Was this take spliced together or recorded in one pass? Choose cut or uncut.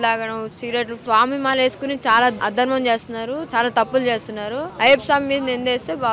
cut